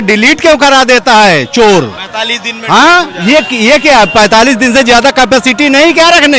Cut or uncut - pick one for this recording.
uncut